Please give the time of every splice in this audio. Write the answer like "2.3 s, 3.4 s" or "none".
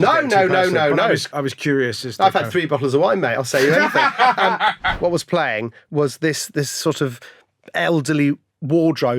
1.3 s, 4.9 s